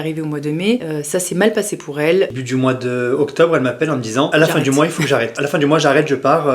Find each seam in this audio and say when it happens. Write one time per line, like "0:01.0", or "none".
0:00.9
0:02.3
0:04.3
0:05.4